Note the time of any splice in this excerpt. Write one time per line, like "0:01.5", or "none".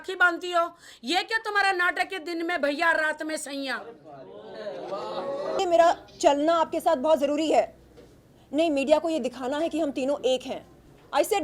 0:05.6